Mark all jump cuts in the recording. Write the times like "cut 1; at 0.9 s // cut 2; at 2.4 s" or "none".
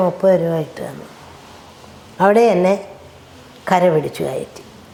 none